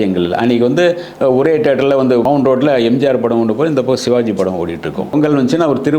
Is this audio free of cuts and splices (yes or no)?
no